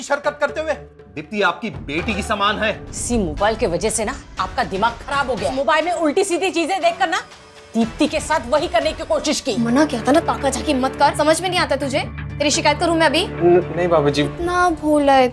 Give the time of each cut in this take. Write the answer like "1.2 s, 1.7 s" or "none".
2.9 s, 5.5 s, 9.6 s, 11.1 s, 14.3 s